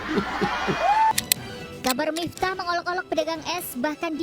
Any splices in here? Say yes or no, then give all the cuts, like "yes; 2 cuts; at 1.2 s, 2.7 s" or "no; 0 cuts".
yes; 1 cut; at 1.1 s